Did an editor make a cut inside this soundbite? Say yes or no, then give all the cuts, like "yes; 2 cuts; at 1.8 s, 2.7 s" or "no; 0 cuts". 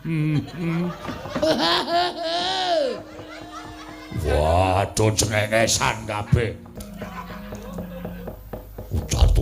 yes; 1 cut; at 6.8 s